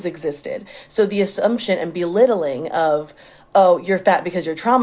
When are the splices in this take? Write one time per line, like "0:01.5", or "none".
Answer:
0:03.8